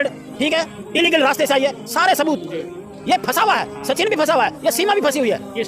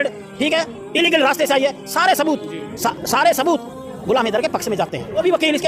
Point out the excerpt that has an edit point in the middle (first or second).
first